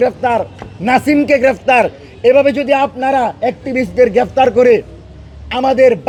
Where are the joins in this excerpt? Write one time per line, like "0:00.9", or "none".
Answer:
none